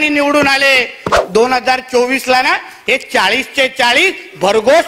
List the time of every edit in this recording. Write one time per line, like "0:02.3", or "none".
0:01.1